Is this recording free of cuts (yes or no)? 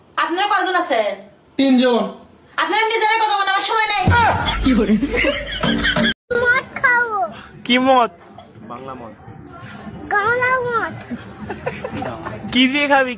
no